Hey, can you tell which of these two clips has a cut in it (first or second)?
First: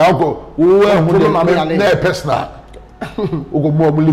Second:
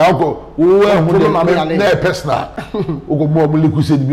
second